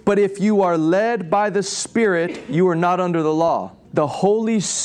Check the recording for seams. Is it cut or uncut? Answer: cut